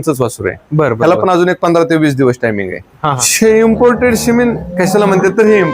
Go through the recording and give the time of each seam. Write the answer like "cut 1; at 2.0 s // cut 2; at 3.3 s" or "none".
cut 1; at 3.1 s